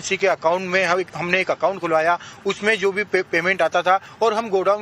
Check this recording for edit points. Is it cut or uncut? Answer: uncut